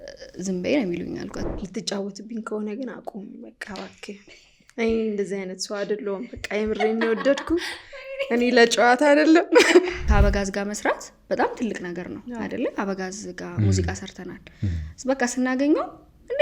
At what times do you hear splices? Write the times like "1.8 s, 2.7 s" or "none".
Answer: 1.4 s, 10.0 s